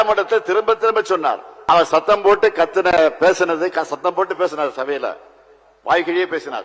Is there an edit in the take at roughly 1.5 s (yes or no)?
yes